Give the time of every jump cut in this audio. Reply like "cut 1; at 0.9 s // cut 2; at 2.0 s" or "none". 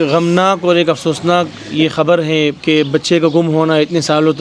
cut 1; at 2.6 s